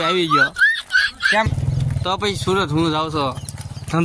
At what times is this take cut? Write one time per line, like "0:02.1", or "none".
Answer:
0:01.5